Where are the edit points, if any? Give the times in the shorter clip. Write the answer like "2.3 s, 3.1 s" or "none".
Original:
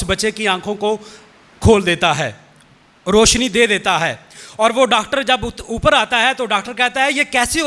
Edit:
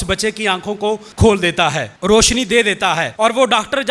1.1 s, 1.9 s, 3.1 s